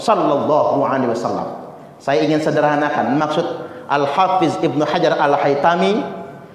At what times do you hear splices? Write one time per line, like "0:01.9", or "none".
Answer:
none